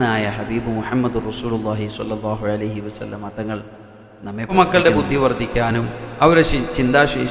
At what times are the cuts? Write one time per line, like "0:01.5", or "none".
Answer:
0:04.5